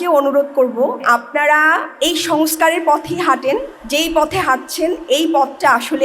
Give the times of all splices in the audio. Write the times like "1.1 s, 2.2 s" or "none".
1.0 s, 1.9 s, 3.8 s